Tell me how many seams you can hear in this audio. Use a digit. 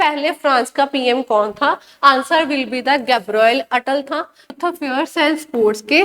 1